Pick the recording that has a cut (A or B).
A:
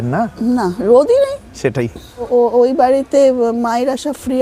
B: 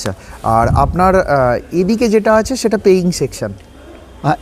A